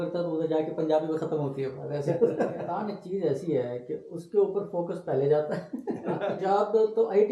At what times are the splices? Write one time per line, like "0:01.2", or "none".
0:02.8
0:06.3